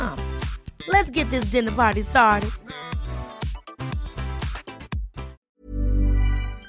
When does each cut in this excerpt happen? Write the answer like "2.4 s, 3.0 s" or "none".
5.4 s

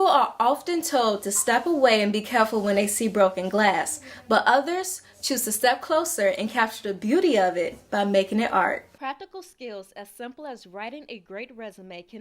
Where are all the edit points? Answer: 8.9 s

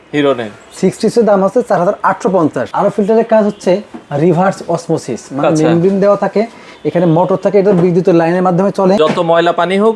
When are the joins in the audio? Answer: 2.7 s, 9.0 s

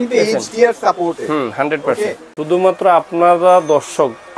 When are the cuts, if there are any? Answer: 2.3 s

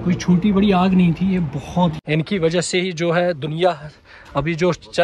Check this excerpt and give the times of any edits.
2.0 s

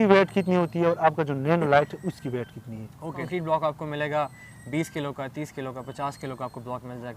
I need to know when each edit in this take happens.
3.2 s

